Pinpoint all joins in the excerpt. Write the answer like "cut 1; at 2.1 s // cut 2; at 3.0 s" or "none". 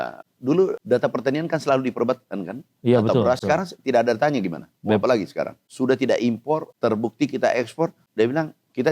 cut 1; at 0.8 s // cut 2; at 3.4 s // cut 3; at 5.6 s // cut 4; at 6.7 s // cut 5; at 8.0 s